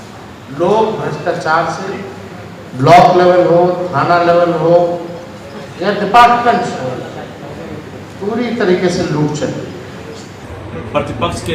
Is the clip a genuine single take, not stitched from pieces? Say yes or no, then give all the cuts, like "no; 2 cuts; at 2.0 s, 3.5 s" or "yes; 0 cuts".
no; 1 cut; at 10.1 s